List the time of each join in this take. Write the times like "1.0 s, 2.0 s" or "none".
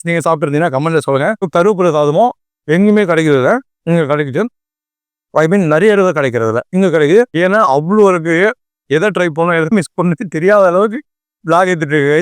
1.5 s, 7.3 s